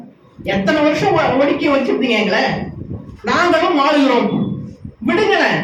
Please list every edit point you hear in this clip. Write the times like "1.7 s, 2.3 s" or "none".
none